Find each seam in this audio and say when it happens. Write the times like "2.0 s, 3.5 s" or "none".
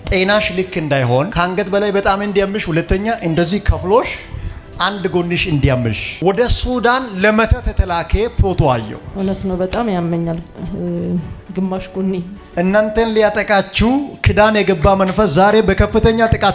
12.4 s